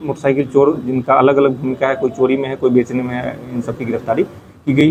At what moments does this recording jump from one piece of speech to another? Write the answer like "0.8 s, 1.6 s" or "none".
none